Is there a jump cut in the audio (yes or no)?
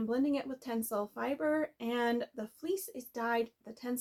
no